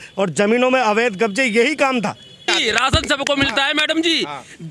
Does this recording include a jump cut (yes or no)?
yes